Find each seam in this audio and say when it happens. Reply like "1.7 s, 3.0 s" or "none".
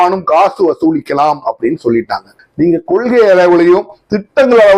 2.4 s